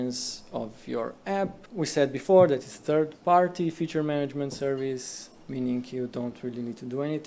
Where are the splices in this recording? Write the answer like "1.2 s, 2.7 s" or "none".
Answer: 1.6 s